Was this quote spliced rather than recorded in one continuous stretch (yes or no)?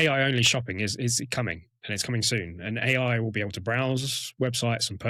no